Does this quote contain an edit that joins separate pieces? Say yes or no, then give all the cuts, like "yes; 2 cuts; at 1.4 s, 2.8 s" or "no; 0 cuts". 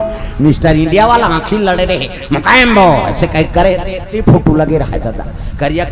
no; 0 cuts